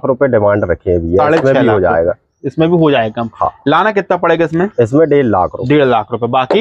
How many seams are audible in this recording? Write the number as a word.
zero